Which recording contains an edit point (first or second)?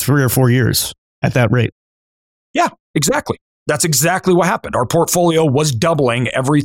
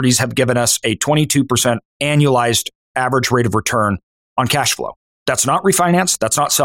second